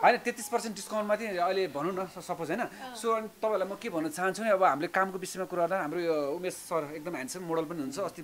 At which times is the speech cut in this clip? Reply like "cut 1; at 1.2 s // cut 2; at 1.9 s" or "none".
none